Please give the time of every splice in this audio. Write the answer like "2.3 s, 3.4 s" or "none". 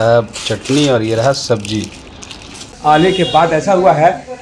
2.6 s